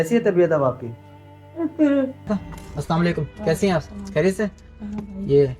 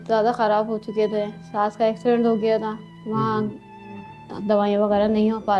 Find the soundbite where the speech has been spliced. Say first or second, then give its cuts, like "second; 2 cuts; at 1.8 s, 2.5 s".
first; 1 cut; at 2.3 s